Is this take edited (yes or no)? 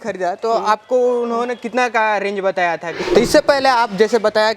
yes